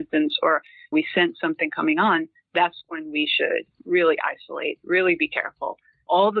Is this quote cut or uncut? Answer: cut